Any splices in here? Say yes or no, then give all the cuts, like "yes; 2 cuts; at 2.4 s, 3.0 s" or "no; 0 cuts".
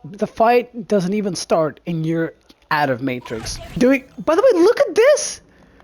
yes; 1 cut; at 3.8 s